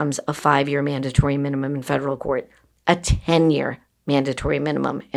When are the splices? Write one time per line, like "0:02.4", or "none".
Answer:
none

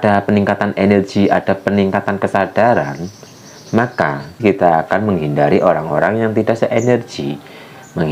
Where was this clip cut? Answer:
0:04.4

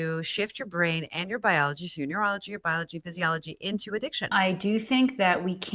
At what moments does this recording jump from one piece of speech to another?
0:04.3

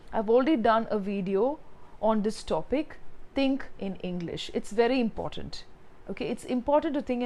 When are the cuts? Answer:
none

